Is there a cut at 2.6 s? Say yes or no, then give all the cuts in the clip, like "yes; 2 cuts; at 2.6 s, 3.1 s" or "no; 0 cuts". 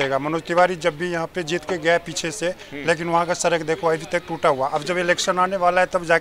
no; 0 cuts